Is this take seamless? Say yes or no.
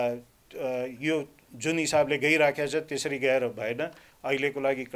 yes